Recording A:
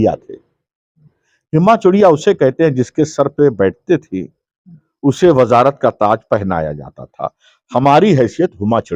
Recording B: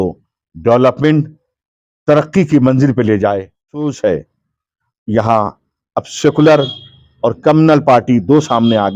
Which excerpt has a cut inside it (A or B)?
B